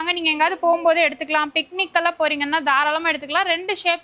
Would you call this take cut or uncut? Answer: uncut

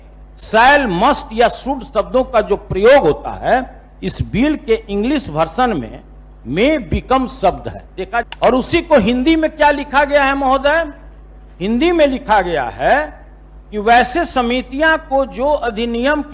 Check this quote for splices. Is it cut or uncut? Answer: cut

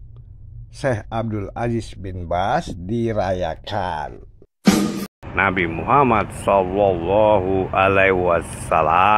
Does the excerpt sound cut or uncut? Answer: cut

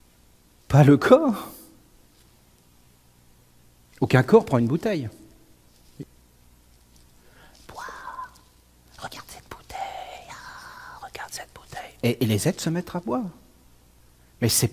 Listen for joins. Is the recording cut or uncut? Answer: cut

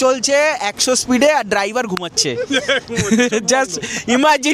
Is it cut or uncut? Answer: uncut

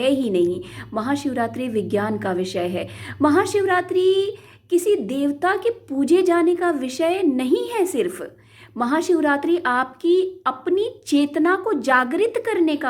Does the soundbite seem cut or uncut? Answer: uncut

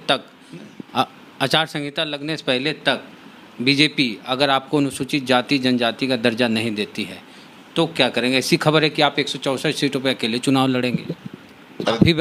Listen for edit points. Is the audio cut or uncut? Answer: uncut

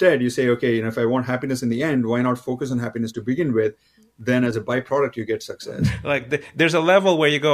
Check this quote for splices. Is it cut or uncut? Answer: cut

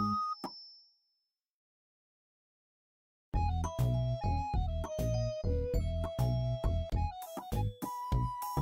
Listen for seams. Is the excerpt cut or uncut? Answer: uncut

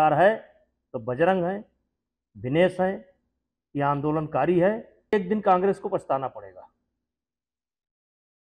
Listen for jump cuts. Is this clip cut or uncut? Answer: cut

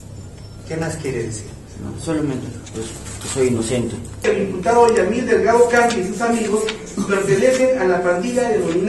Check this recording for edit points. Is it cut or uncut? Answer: cut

